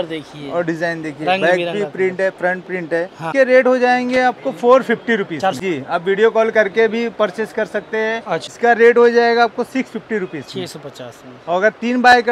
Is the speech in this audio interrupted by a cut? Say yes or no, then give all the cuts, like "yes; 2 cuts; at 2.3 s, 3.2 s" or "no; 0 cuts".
yes; 3 cuts; at 3.3 s, 5.6 s, 8.5 s